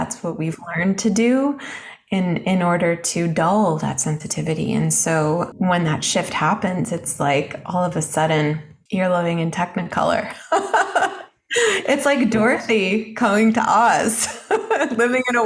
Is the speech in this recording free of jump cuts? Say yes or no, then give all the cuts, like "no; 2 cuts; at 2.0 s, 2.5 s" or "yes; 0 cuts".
no; 2 cuts; at 5.5 s, 8.7 s